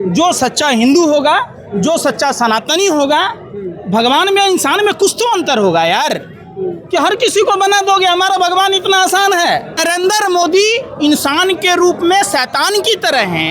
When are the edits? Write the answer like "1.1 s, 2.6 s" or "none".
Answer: 9.8 s